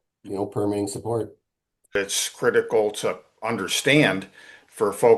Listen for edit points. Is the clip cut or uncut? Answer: cut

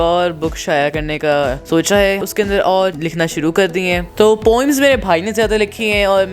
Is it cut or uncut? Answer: cut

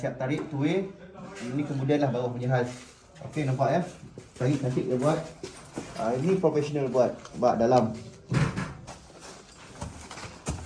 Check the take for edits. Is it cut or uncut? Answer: uncut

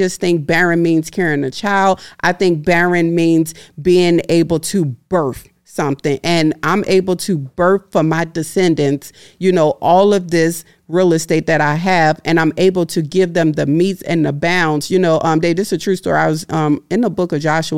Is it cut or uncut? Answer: uncut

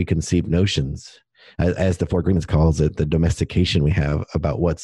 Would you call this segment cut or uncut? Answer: uncut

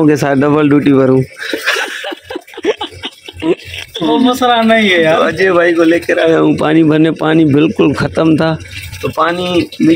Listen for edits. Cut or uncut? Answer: uncut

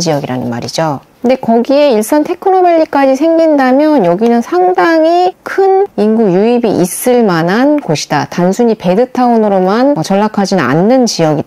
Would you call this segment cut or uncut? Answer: uncut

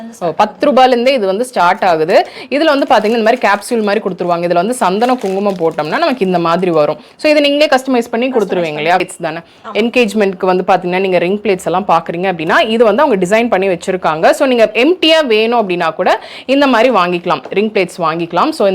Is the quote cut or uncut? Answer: cut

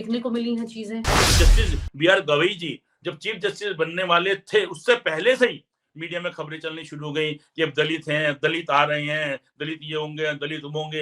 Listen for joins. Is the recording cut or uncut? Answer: cut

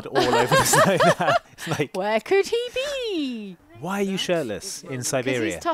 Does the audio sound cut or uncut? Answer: cut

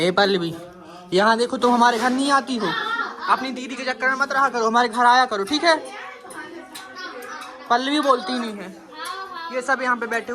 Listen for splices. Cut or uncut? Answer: uncut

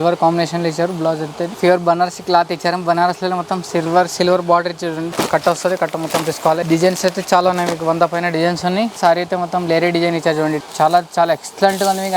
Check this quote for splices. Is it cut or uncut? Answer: cut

